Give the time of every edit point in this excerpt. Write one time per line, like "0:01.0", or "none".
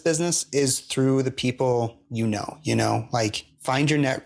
none